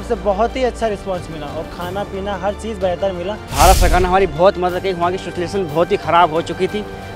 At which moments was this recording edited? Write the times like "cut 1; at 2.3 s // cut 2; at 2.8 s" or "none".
cut 1; at 3.5 s